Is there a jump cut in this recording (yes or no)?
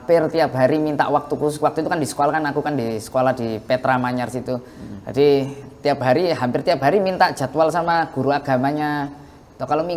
no